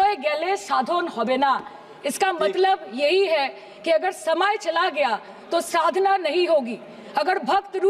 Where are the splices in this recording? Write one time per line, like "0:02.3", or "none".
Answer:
none